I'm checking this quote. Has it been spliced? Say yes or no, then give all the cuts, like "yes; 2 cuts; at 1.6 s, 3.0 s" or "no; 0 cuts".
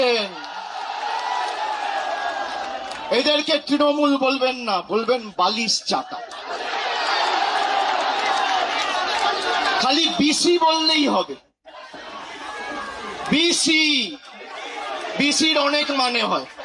no; 0 cuts